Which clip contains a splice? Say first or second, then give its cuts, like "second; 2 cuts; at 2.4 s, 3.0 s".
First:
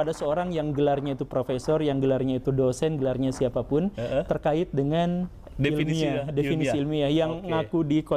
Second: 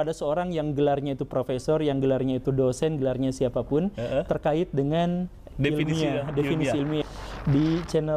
second; 1 cut; at 7.0 s